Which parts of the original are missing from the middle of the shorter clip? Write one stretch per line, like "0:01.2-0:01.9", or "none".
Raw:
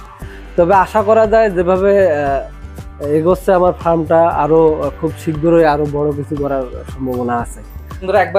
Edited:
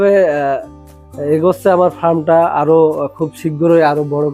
none